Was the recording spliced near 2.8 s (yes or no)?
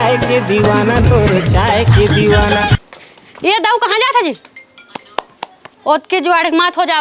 yes